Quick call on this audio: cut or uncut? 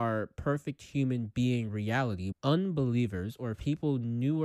cut